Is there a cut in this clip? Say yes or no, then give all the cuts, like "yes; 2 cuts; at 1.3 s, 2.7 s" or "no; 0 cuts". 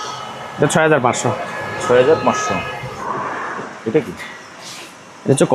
yes; 1 cut; at 3.0 s